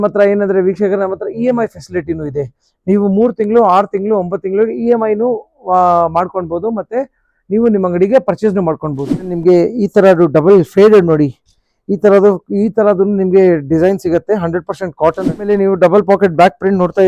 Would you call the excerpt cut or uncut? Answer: cut